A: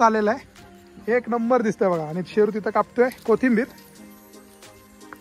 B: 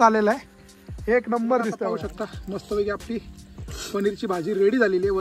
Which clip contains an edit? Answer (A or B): B